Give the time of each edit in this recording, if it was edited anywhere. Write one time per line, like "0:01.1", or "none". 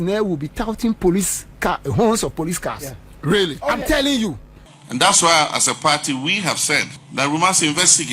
0:04.5
0:07.0